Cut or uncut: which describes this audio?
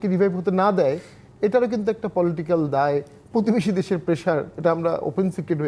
uncut